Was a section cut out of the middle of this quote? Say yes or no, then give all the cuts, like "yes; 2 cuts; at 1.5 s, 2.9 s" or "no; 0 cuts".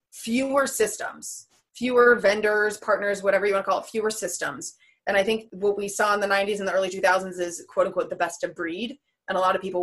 yes; 1 cut; at 5.5 s